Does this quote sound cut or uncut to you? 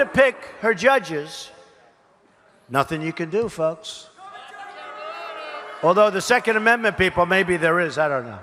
uncut